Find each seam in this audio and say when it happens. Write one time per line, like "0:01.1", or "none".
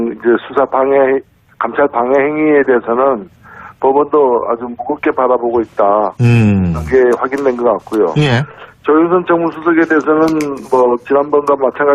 0:03.0